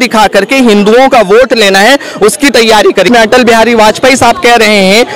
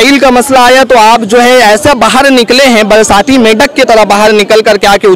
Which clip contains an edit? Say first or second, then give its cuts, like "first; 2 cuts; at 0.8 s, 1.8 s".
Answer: first; 1 cut; at 3.1 s